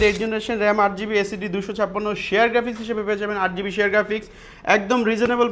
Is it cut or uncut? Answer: uncut